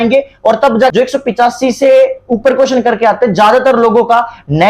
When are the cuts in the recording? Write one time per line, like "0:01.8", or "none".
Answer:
0:00.9